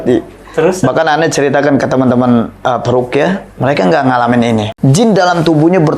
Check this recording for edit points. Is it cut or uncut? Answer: cut